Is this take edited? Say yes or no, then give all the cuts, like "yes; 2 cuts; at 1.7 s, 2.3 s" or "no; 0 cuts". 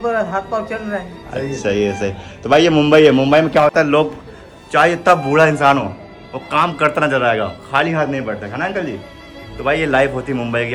no; 0 cuts